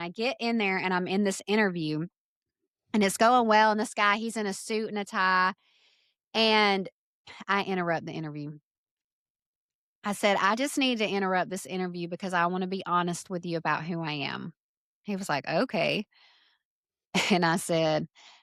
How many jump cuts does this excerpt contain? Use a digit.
0